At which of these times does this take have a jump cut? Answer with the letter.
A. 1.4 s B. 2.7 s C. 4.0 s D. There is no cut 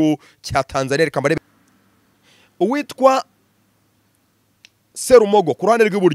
A